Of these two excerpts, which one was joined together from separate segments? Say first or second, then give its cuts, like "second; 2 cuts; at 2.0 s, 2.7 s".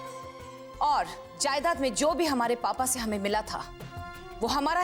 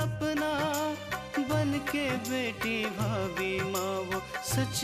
first; 1 cut; at 1.2 s